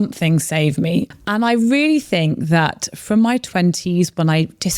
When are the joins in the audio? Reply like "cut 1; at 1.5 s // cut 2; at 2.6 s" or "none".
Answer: cut 1; at 1.1 s